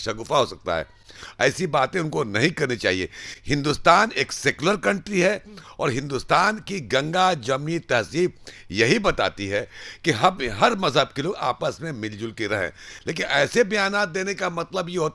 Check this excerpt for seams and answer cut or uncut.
uncut